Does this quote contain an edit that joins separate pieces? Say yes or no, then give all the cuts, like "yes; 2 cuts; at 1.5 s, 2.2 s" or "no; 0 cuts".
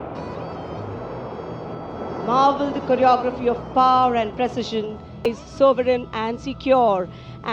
yes; 1 cut; at 5.2 s